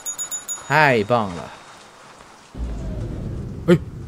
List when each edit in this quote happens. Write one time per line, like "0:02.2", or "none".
0:03.1